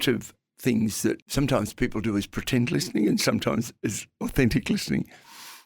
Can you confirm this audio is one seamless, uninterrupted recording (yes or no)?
no